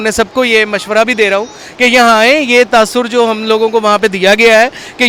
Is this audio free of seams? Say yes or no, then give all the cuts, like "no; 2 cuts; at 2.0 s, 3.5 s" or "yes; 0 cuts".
yes; 0 cuts